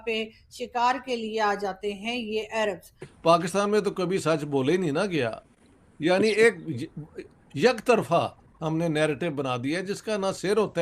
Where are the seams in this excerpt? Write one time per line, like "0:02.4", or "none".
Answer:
0:03.0